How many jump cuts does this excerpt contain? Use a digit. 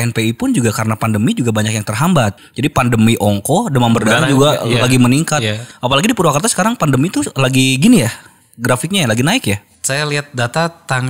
1